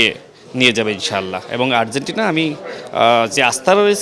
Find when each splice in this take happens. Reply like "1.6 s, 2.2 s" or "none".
none